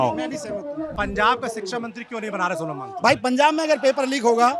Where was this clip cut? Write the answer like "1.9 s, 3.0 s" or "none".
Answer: 0.9 s